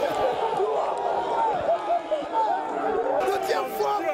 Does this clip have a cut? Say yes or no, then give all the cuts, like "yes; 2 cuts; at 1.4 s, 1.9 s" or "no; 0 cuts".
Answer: yes; 1 cut; at 3.2 s